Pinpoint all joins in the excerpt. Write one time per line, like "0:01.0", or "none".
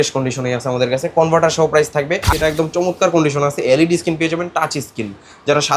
0:02.3

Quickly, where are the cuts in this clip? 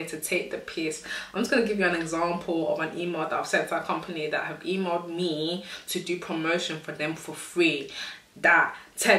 none

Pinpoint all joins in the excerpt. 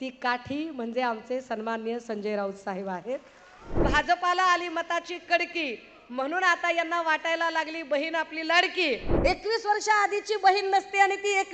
0:03.8
0:09.1

